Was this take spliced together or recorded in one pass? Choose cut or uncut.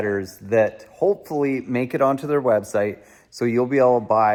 uncut